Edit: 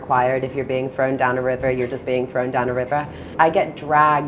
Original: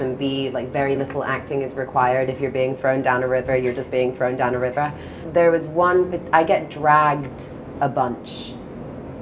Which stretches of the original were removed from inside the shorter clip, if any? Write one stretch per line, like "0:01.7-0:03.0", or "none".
0:05.1-0:06.2